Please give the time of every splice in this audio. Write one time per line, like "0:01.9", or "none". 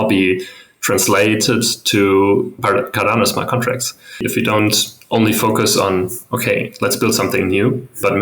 0:04.2